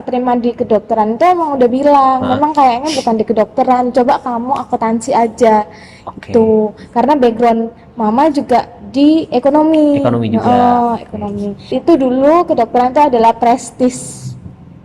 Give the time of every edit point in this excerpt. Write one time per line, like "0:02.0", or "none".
0:11.7